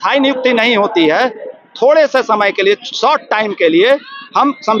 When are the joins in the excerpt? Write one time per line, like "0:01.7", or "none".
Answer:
none